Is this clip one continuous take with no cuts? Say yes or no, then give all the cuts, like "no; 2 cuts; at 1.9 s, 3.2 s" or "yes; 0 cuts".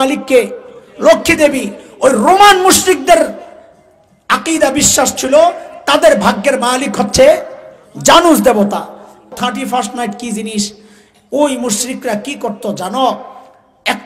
no; 1 cut; at 9.3 s